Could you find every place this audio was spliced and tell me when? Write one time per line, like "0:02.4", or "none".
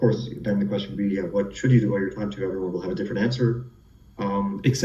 none